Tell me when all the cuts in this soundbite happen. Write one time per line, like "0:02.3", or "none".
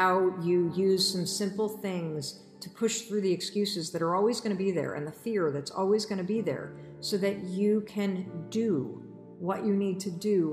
none